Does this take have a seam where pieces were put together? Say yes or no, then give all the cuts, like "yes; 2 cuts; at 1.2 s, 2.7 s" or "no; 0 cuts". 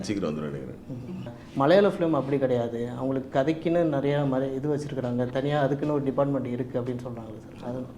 yes; 1 cut; at 1.4 s